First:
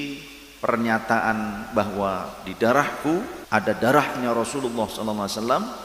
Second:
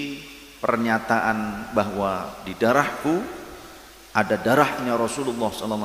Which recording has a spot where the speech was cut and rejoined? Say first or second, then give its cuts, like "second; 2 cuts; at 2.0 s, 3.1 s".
first; 1 cut; at 3.4 s